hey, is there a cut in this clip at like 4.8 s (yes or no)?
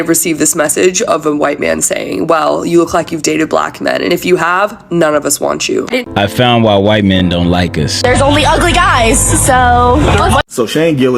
no